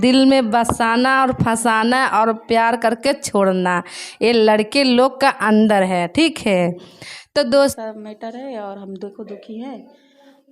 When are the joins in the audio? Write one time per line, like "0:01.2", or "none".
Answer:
0:07.8